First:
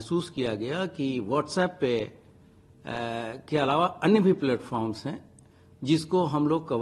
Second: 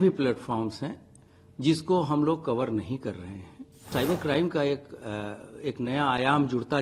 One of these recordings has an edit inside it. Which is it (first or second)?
second